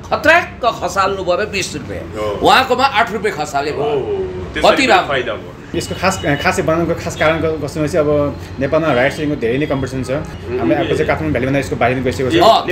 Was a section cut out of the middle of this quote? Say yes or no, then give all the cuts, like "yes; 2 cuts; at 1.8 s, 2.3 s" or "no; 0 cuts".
yes; 2 cuts; at 5.8 s, 10.3 s